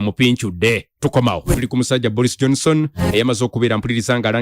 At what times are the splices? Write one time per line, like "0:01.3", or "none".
0:01.5